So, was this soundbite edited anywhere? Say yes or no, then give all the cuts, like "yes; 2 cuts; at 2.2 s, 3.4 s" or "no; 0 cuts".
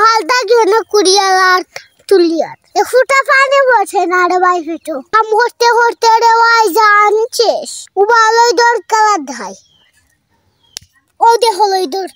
yes; 1 cut; at 7.8 s